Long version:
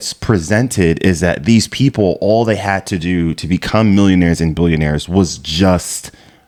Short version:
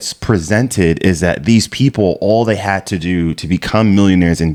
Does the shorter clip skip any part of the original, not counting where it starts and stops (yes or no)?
no